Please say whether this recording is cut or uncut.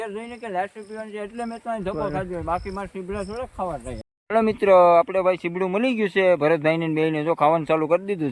cut